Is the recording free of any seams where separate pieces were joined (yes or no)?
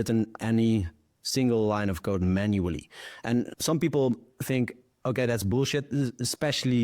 no